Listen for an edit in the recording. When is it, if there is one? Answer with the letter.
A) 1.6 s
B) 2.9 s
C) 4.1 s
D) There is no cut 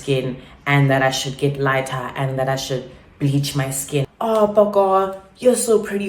C